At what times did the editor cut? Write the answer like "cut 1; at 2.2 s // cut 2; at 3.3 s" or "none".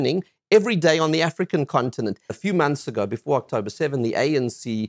cut 1; at 2.3 s